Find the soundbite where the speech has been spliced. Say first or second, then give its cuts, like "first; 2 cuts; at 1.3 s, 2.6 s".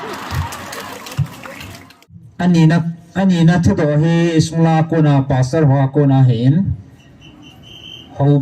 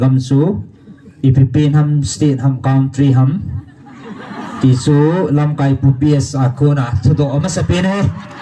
first; 1 cut; at 2.2 s